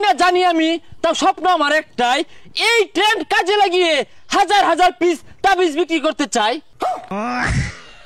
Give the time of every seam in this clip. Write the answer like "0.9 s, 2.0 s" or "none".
6.8 s